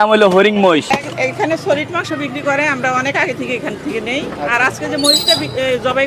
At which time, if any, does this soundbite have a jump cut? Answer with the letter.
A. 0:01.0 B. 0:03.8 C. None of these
A